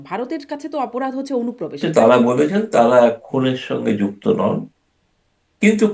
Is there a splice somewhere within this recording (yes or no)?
yes